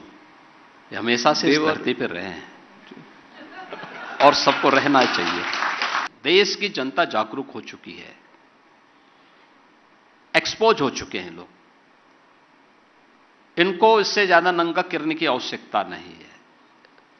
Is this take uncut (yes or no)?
no